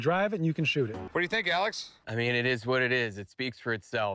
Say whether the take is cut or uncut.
cut